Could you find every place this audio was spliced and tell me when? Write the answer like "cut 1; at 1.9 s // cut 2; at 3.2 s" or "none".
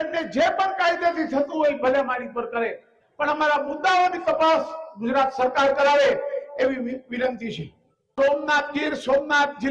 none

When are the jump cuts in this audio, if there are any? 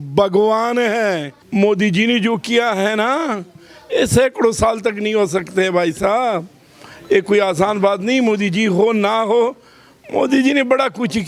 cut 1; at 1.3 s

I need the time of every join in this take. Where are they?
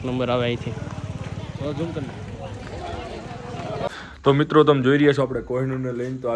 cut 1; at 3.9 s

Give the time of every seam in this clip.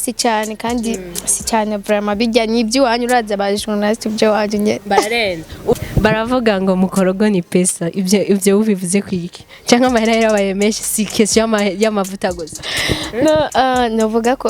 cut 1; at 5.7 s

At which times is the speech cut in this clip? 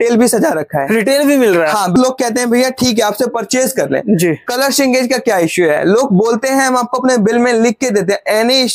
cut 1; at 1.9 s

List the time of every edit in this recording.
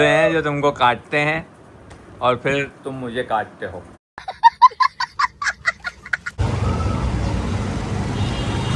cut 1; at 6.4 s

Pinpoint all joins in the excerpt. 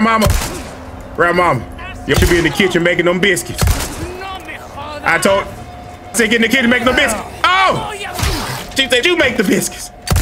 cut 1; at 2.1 s // cut 2; at 6.1 s // cut 3; at 9.0 s

